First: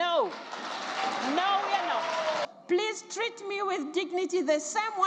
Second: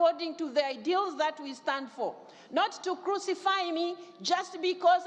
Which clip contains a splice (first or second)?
first